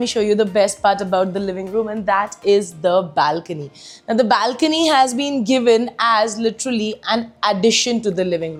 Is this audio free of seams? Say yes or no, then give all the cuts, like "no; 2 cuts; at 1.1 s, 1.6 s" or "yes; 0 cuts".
yes; 0 cuts